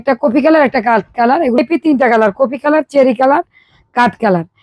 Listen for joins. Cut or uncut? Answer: cut